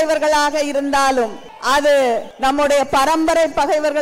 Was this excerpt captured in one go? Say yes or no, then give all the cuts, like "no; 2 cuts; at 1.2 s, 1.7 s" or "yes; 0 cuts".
no; 2 cuts; at 1.5 s, 2.3 s